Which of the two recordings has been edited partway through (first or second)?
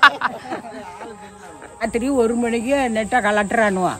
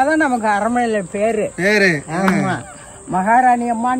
first